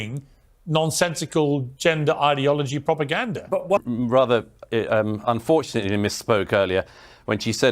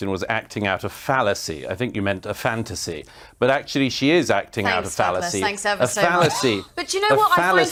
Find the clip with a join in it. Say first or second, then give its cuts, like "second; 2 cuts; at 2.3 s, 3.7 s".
first; 1 cut; at 3.8 s